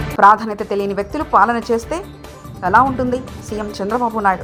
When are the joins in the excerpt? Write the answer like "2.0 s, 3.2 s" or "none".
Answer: none